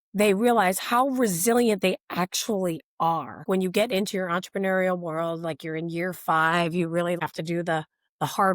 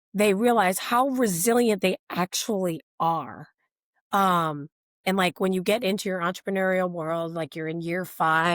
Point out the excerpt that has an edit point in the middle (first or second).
first